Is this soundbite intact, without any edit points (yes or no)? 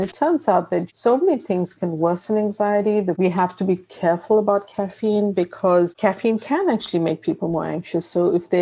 no